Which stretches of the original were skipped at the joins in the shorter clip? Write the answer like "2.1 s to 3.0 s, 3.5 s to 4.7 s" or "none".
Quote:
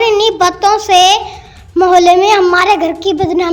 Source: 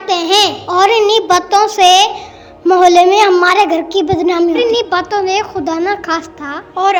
none